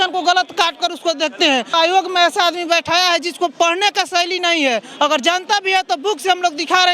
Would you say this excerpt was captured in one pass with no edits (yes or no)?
no